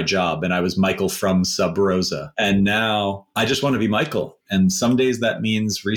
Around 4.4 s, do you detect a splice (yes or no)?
yes